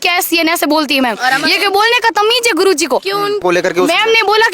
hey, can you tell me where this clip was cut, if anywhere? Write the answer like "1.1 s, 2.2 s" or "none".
3.4 s